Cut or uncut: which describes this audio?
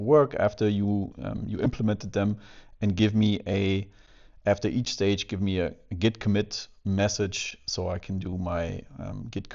uncut